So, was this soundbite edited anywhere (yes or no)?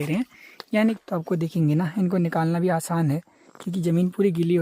yes